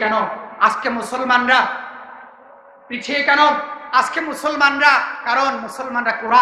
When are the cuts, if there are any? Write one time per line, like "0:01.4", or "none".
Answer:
none